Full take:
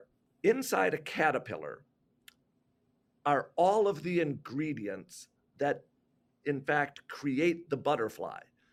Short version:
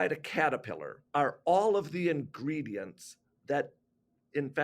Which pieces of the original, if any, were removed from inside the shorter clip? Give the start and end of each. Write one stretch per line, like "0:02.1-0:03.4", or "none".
0:01.7-0:03.0